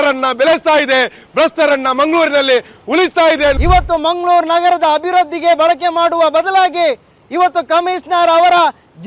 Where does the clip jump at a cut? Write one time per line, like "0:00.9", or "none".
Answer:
0:03.6

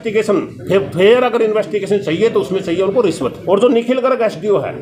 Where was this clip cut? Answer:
0:03.4

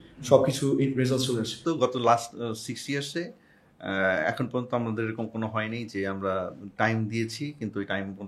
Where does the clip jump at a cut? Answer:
0:01.6

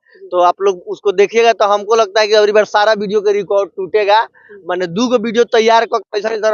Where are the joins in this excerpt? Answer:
none

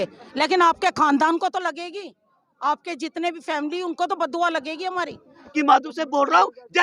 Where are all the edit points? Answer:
0:05.5

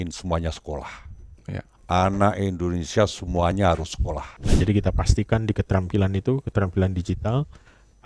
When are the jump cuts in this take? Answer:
0:04.4

